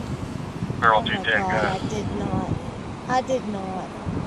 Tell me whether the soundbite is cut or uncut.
uncut